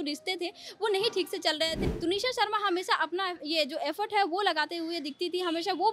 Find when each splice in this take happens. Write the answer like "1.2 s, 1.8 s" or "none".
1.8 s